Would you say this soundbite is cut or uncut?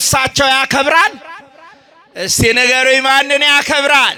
uncut